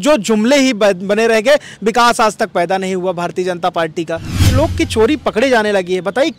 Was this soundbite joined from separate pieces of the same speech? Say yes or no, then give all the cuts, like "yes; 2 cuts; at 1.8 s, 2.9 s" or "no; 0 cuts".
yes; 1 cut; at 4.5 s